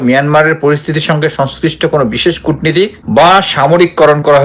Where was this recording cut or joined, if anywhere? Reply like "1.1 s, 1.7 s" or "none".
3.0 s